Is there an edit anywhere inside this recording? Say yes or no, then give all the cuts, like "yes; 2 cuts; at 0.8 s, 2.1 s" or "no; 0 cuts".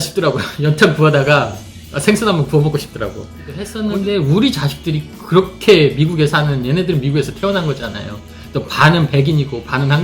yes; 1 cut; at 3.7 s